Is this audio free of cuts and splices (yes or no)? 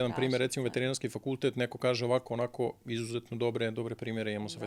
yes